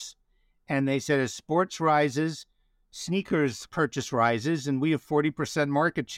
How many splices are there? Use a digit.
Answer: 1